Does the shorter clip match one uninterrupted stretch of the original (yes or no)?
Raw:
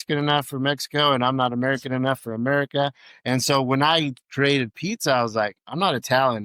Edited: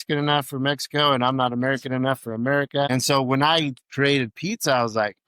no